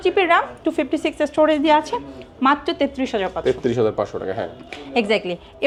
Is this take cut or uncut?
uncut